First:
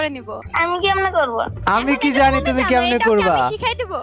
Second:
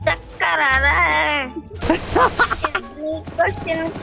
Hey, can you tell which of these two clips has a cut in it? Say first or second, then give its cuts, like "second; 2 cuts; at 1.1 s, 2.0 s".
first; 1 cut; at 1.5 s